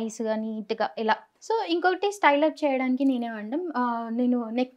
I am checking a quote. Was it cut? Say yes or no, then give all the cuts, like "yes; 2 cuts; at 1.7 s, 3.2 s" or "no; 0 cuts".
yes; 1 cut; at 1.3 s